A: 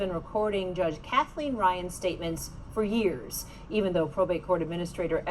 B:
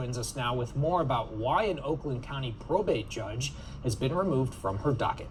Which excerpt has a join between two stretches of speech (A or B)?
A